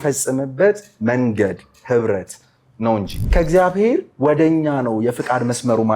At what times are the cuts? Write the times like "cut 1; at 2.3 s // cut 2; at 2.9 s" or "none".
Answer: cut 1; at 3.3 s